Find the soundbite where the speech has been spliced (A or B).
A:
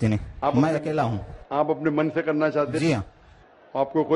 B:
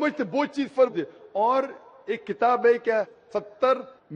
A